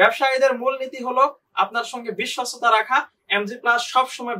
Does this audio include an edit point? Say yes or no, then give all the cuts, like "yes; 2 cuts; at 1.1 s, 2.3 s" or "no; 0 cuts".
no; 0 cuts